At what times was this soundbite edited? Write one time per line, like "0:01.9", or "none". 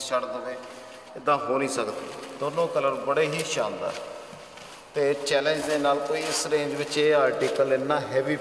0:02.0